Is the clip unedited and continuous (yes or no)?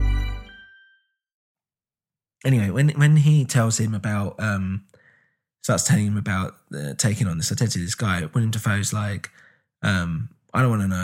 yes